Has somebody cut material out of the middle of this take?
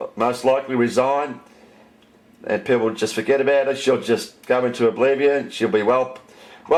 no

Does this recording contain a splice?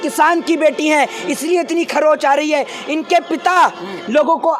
no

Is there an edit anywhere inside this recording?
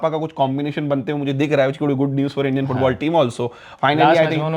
no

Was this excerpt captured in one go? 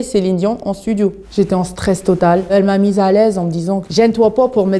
no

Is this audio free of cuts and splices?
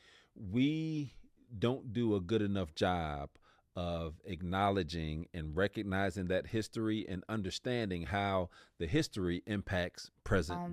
yes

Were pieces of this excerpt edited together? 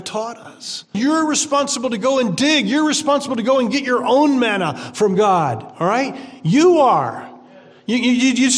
yes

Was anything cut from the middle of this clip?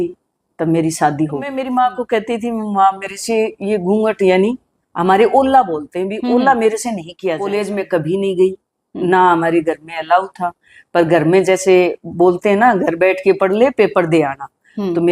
yes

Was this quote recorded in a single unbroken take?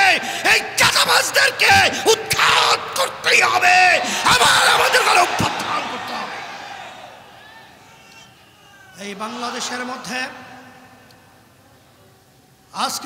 yes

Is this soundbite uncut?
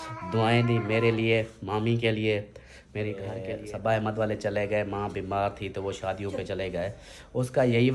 no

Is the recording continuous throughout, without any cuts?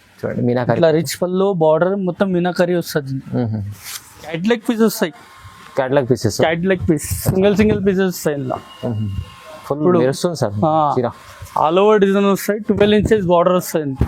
no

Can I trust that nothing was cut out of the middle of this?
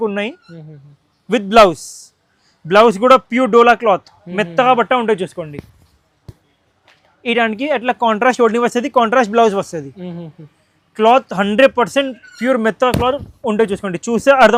yes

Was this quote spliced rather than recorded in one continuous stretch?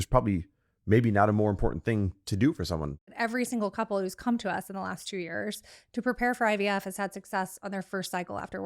yes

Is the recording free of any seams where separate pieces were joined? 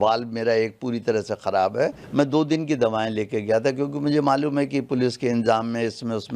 no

